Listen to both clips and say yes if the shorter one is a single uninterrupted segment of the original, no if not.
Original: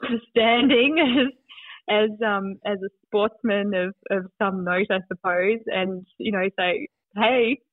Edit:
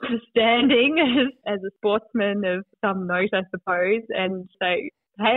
no